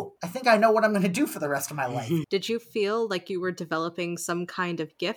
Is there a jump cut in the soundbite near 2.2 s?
yes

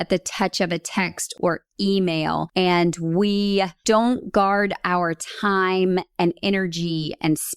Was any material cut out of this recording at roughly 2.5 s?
yes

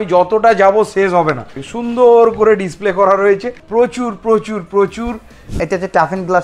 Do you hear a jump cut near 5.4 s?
yes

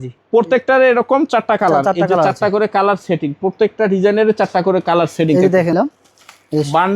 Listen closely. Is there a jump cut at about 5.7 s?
yes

